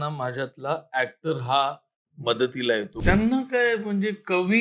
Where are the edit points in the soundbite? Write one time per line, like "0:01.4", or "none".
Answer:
0:02.9